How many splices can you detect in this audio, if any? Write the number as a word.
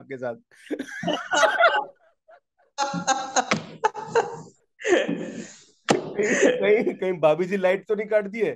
zero